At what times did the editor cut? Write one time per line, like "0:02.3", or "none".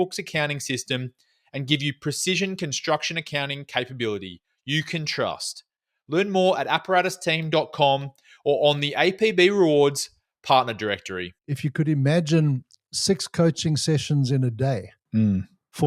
0:11.3